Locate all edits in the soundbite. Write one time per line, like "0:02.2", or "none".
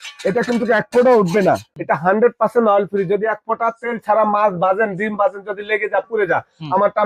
0:01.7